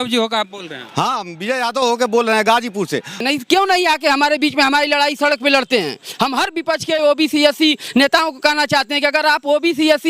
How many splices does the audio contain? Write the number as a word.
one